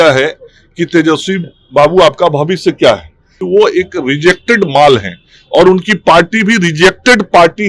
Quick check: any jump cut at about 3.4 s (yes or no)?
yes